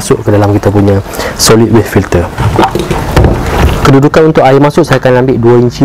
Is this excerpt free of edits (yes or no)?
yes